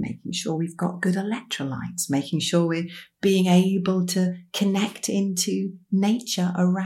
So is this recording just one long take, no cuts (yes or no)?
yes